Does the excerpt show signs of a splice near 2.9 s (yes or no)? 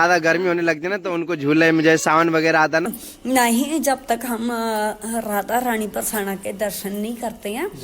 yes